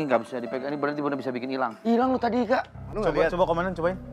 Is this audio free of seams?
no; 1 cut; at 2.8 s

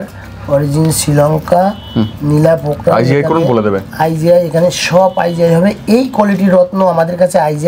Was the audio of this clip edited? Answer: no; 0 cuts

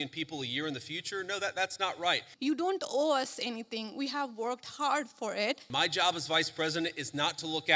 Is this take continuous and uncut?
no; 2 cuts; at 2.3 s, 5.6 s

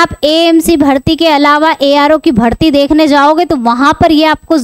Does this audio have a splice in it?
no; 0 cuts

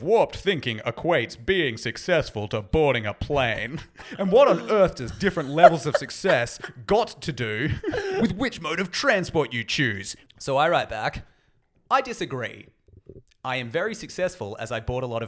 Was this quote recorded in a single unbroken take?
no; 3 cuts; at 4.1 s, 8.2 s, 10.1 s

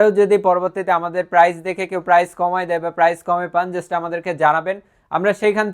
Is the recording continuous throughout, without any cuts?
yes; 0 cuts

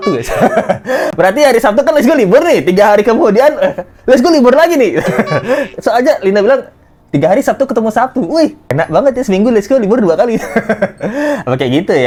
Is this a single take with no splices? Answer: yes; 0 cuts

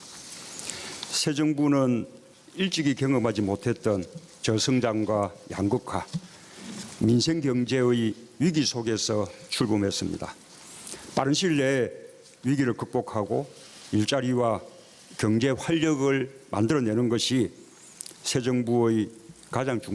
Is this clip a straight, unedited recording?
yes; 0 cuts

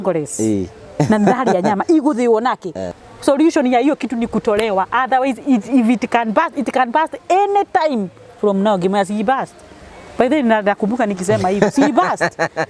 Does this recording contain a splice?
yes; 1 cut; at 2.8 s

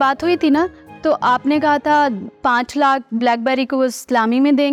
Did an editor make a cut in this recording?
no; 0 cuts

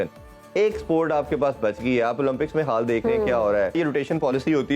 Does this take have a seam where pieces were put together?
yes; 1 cut; at 3.7 s

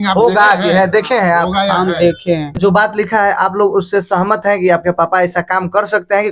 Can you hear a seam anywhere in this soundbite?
yes; 1 cut; at 2.6 s

